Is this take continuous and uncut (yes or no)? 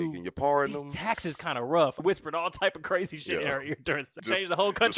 no